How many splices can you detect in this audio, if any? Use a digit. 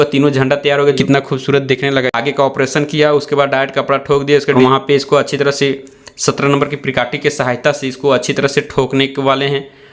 2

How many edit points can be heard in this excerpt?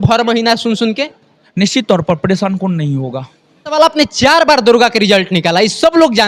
0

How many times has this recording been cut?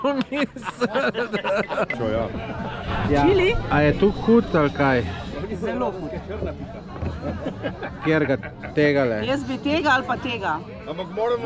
1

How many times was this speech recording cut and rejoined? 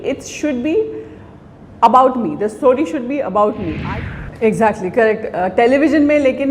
1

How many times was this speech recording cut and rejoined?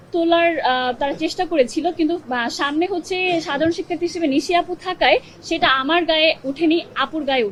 0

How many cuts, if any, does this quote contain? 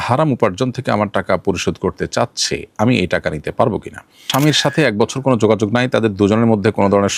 1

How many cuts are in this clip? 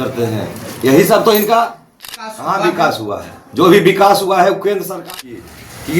2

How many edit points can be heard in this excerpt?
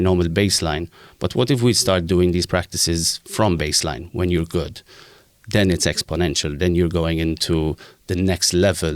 0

